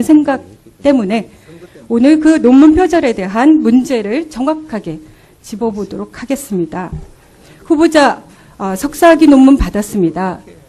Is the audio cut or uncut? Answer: uncut